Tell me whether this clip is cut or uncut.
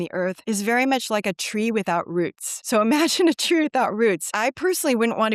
uncut